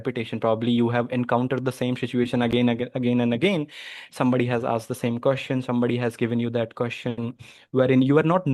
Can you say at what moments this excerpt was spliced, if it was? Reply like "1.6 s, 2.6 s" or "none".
none